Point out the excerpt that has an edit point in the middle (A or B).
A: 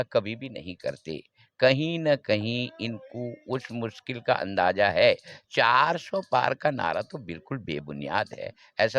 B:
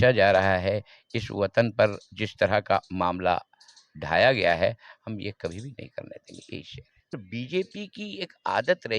B